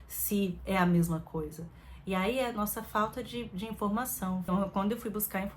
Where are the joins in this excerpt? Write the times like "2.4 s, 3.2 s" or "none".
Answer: 4.4 s